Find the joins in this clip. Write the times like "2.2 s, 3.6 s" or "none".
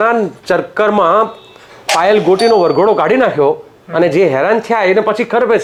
none